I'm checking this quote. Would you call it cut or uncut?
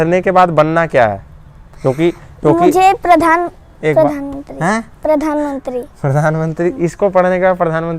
uncut